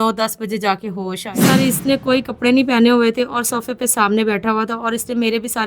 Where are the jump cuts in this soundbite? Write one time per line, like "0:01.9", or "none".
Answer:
0:01.4